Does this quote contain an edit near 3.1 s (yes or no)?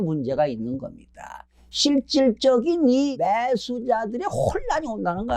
yes